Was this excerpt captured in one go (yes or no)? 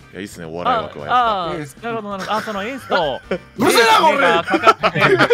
yes